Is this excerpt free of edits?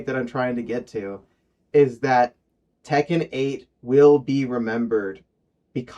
yes; 0 cuts

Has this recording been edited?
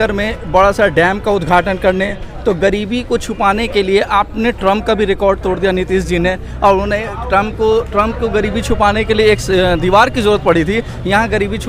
no; 0 cuts

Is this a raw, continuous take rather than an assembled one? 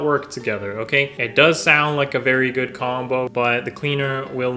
no; 2 cuts; at 1.2 s, 3.3 s

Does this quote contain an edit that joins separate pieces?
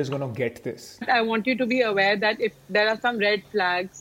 yes; 1 cut; at 1.0 s

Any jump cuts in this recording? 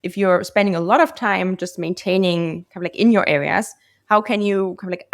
no; 0 cuts

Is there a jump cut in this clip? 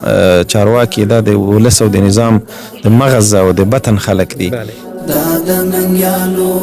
yes; 1 cut; at 4.9 s

